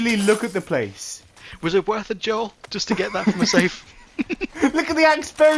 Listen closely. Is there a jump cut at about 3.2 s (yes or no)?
no